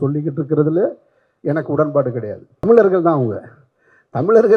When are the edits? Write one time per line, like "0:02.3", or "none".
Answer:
0:02.7